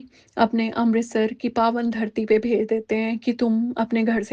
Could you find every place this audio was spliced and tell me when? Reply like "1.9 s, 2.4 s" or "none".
none